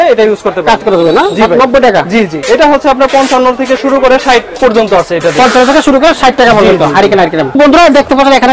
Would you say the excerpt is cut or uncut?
cut